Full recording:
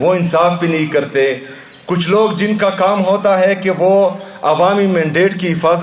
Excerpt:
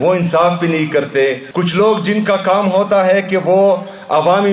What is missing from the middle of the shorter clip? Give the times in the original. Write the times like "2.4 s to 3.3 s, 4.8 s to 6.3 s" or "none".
1.4 s to 1.8 s